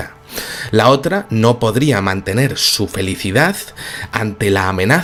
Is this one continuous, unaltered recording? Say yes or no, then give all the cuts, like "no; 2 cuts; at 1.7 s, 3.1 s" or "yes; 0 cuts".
yes; 0 cuts